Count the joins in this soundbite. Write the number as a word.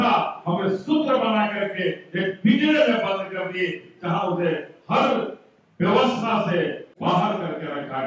one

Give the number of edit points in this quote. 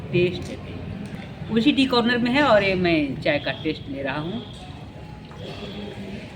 one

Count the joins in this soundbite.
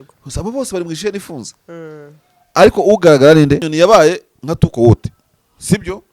one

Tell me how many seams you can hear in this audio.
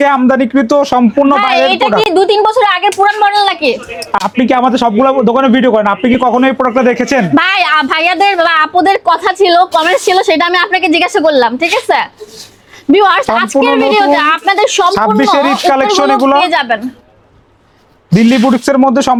zero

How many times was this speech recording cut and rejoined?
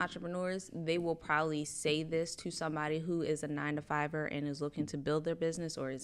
zero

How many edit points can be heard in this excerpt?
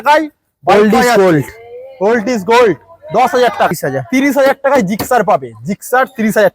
one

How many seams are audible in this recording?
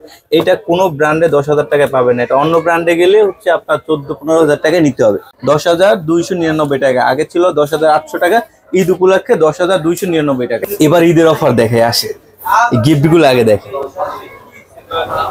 two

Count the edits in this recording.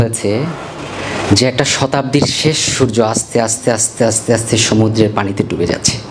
zero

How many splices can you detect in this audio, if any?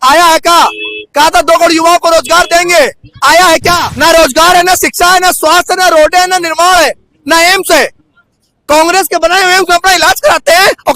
one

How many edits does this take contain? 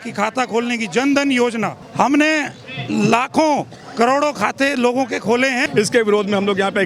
two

